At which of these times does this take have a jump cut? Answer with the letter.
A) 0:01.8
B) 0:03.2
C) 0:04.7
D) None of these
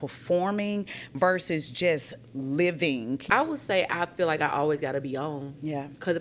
B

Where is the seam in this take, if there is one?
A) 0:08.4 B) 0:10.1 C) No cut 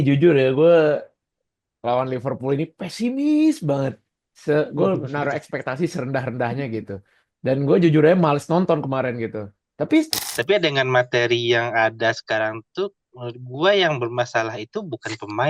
B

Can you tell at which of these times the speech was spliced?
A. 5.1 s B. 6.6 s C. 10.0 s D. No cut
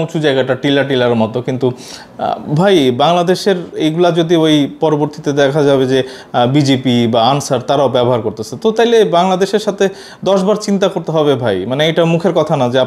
D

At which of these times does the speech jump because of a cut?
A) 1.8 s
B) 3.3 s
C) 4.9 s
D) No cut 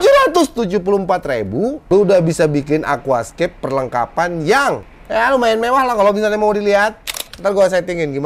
A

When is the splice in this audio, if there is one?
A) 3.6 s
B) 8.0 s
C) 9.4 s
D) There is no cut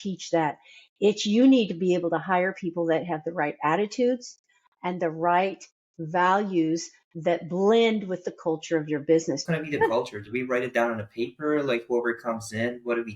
C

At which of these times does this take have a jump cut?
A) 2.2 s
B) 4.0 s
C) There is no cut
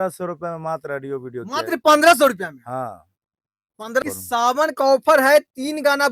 B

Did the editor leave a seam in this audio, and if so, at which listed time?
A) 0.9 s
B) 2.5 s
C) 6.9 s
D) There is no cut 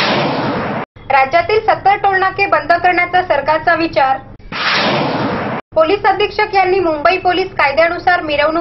A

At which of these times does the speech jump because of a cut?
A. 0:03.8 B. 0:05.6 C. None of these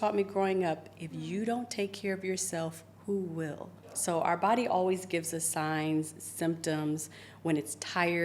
A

